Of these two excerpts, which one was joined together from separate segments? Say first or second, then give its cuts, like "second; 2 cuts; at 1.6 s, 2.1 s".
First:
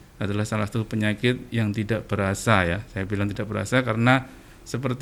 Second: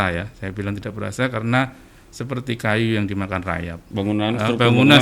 second; 1 cut; at 3.8 s